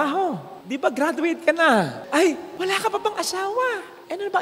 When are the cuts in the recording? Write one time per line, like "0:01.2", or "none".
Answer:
0:02.0